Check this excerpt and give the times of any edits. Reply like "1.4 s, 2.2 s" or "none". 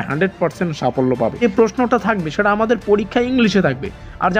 1.4 s